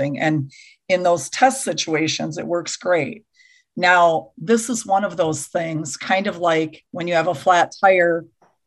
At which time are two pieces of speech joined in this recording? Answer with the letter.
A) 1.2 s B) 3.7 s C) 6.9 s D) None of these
C